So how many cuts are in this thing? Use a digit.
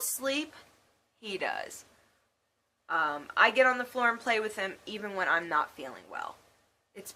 0